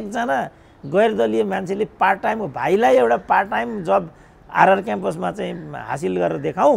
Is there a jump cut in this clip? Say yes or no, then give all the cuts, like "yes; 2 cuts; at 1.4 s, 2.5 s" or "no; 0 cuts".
no; 0 cuts